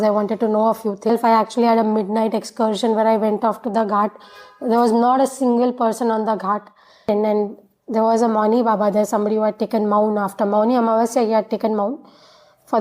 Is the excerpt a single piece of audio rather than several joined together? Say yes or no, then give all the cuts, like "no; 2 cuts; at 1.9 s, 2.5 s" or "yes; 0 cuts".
no; 2 cuts; at 1.1 s, 7.1 s